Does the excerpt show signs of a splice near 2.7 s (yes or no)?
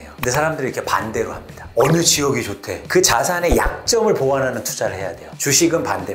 yes